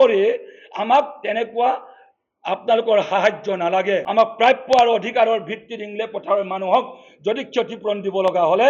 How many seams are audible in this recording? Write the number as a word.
one